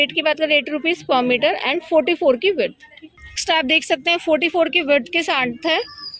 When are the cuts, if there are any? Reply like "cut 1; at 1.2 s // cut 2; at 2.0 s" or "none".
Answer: none